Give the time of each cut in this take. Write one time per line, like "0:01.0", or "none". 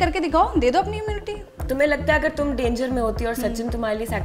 0:01.5